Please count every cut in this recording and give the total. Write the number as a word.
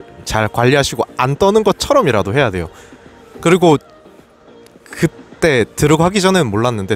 zero